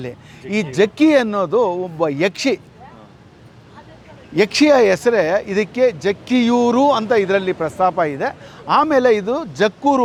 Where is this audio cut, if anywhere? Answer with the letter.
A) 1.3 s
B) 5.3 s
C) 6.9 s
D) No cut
D